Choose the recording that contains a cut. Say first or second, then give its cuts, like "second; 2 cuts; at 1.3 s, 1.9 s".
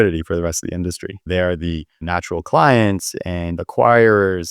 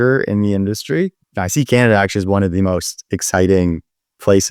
first; 2 cuts; at 1.2 s, 2.0 s